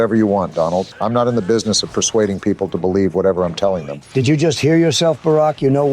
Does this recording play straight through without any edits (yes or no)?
no